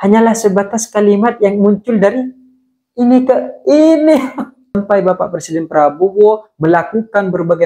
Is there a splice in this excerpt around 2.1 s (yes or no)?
no